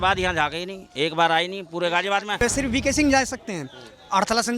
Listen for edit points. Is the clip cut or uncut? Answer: cut